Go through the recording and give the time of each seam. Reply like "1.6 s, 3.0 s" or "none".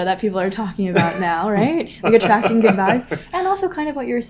none

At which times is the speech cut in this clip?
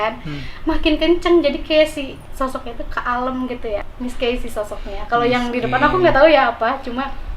3.8 s

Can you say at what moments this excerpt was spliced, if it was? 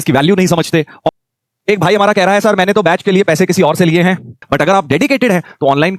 1.1 s, 4.3 s

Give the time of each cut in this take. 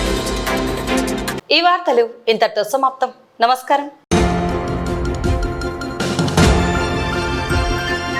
none

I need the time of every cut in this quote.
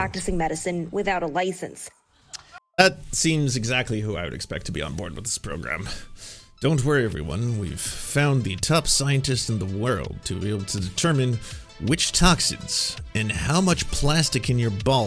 2.6 s

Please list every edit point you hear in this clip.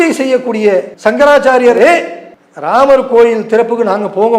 0.9 s, 1.8 s

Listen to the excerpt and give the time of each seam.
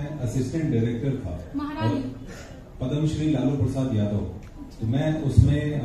none

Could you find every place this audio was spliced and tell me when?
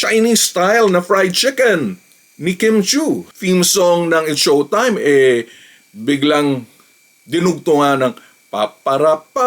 3.3 s

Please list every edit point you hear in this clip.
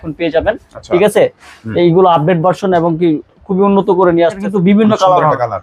4.4 s

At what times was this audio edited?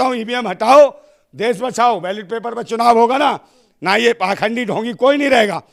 none

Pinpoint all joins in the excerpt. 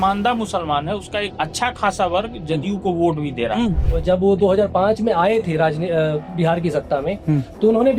1.3 s, 3.8 s

